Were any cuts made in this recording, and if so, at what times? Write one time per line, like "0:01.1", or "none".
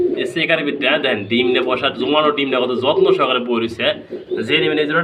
none